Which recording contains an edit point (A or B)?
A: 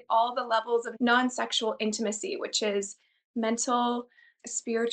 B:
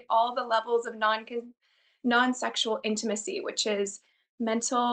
A